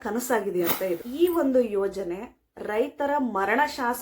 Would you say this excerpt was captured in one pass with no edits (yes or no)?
no